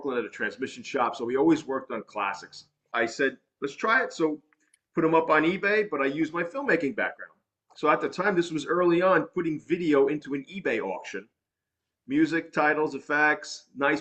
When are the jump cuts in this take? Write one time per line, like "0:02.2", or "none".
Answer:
0:02.9